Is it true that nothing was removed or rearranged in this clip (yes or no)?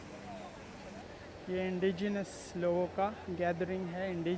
no